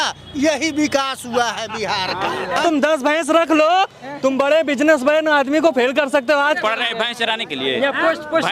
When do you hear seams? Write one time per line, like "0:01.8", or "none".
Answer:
0:02.6
0:06.6